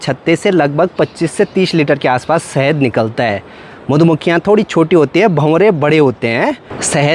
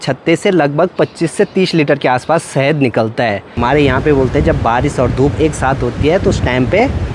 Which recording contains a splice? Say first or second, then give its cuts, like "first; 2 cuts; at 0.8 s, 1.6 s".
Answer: second; 1 cut; at 3.5 s